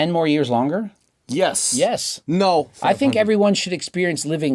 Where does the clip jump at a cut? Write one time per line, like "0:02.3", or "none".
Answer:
0:02.7